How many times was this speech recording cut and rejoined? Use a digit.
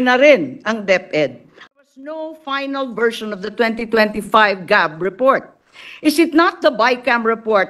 1